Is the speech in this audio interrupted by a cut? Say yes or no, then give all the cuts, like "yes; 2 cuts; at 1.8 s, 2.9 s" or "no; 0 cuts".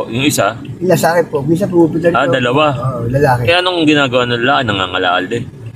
no; 0 cuts